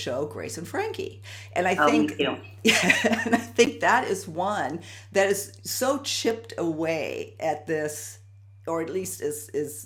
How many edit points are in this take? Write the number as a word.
zero